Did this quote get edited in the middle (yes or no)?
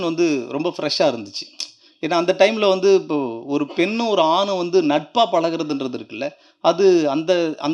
no